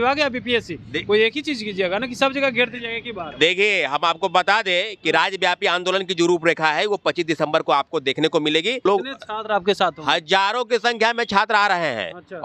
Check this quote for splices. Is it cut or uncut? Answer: cut